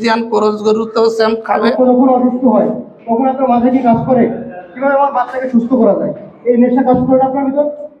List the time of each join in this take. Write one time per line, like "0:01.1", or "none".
0:01.7